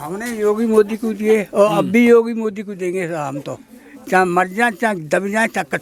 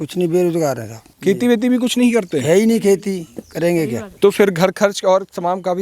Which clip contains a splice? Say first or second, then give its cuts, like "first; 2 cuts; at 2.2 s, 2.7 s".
second; 2 cuts; at 1.1 s, 4.0 s